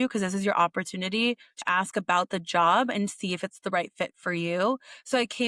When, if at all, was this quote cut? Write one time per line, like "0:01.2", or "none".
0:01.6